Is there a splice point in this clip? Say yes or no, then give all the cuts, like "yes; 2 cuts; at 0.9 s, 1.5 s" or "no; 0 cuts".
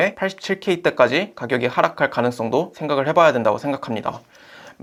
no; 0 cuts